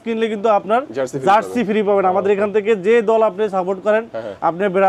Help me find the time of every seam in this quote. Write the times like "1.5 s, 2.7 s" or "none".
none